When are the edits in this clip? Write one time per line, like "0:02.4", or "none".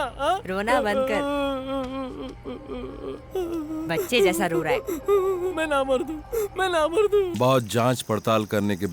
0:07.3